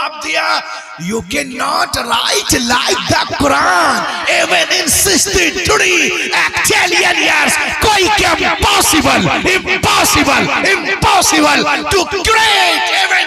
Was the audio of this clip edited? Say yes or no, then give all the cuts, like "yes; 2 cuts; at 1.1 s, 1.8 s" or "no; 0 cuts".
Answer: no; 0 cuts